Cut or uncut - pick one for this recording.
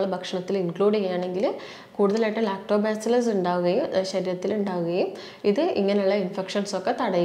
uncut